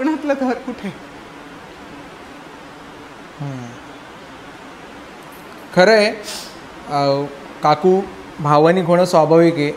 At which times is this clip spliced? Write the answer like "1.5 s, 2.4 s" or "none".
none